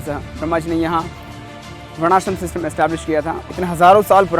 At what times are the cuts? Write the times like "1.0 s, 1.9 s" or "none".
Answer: 3.4 s

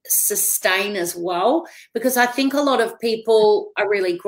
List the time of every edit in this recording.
none

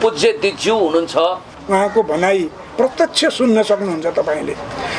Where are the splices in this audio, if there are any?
1.6 s

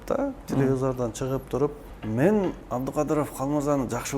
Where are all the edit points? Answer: 1.9 s, 2.6 s

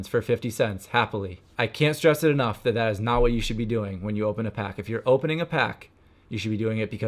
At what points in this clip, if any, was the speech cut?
1.4 s

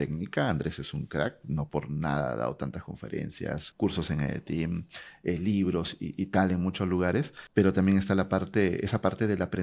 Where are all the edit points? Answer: none

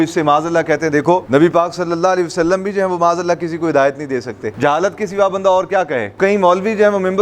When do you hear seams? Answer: 1.2 s, 4.5 s, 6.1 s

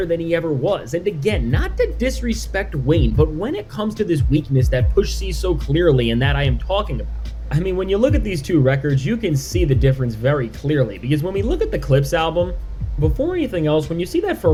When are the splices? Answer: none

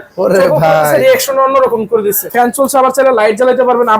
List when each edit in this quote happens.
2.3 s

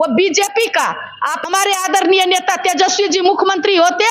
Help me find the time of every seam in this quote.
1.4 s

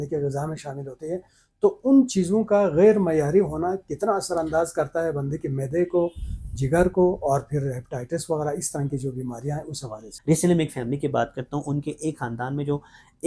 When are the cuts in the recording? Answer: 10.1 s

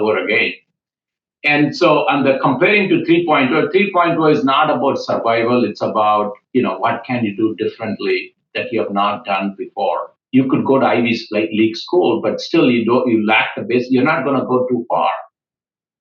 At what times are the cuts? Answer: 10.1 s

